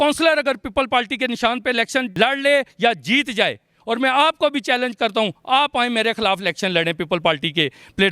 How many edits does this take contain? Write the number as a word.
one